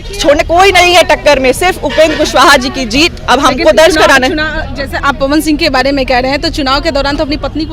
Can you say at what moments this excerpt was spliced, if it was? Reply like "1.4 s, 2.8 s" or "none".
none